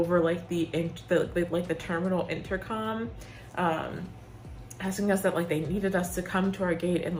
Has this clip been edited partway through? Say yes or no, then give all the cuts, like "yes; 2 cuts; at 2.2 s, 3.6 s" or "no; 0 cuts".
no; 0 cuts